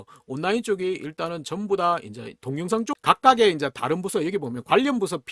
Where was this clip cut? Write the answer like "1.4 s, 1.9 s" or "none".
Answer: 2.9 s